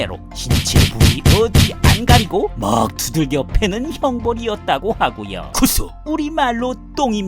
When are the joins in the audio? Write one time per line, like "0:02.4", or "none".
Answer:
0:05.4

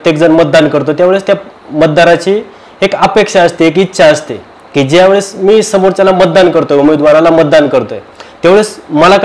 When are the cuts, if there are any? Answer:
none

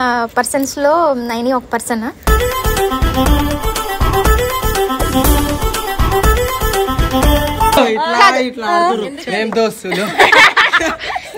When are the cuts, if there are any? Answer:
0:07.8

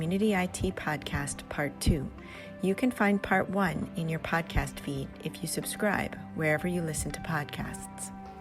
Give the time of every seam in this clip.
none

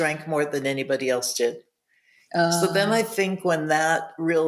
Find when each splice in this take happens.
none

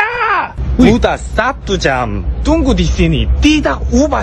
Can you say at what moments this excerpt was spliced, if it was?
none

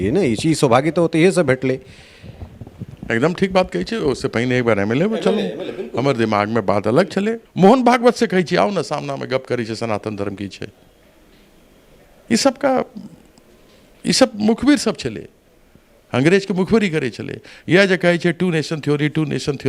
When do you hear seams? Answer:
0:07.4

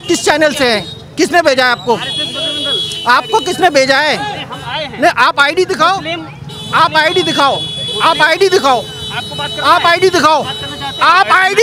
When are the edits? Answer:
none

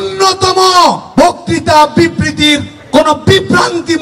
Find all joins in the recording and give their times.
0:01.0
0:02.7

